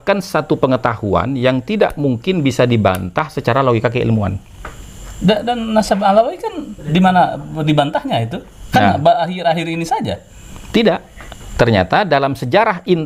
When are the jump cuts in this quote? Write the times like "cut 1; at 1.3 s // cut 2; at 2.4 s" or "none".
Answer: none